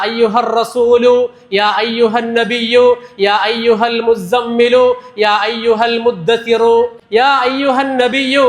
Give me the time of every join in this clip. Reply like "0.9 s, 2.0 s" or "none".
7.0 s